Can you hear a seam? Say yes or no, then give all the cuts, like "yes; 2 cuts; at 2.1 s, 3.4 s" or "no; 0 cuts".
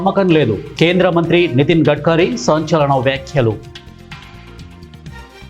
yes; 1 cut; at 4.2 s